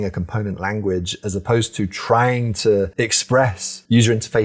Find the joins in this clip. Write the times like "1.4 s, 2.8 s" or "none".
3.2 s